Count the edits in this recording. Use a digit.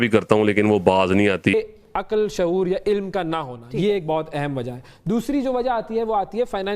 1